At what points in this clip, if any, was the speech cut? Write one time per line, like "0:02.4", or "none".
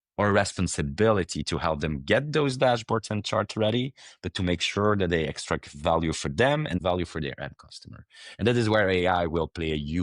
0:06.8